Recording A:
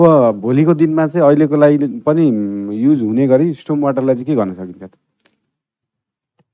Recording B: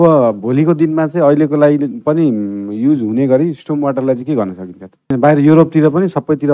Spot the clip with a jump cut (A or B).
B